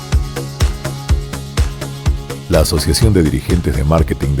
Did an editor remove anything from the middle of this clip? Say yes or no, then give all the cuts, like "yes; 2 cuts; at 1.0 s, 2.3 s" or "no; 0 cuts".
yes; 1 cut; at 2.0 s